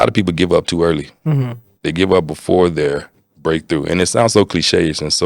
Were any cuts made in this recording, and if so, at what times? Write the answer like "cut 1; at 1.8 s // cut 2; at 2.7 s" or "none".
none